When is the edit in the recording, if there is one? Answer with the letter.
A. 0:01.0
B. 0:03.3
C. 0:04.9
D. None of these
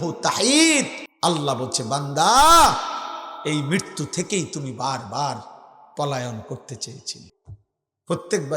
A